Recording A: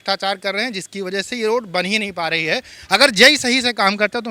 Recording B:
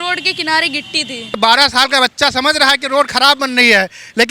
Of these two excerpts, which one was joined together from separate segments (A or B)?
B